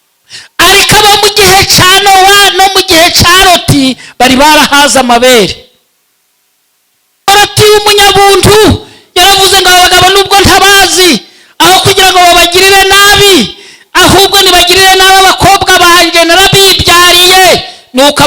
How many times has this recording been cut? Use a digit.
1